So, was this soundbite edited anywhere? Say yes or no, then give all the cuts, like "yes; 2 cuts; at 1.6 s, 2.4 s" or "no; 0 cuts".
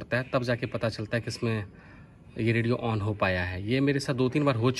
no; 0 cuts